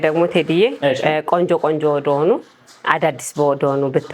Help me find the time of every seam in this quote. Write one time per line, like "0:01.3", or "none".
none